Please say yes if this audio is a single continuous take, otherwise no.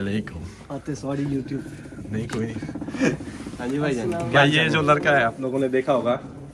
yes